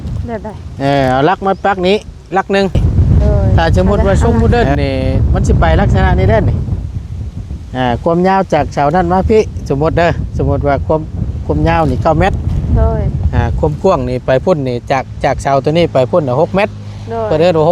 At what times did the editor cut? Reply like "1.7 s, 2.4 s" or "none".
2.8 s